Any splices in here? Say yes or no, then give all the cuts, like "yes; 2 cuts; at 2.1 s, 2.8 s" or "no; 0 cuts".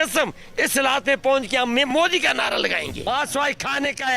yes; 1 cut; at 3.0 s